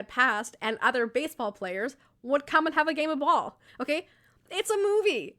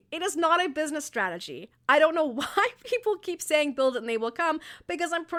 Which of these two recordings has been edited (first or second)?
first